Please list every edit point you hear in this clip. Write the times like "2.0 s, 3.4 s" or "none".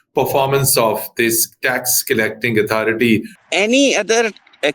3.4 s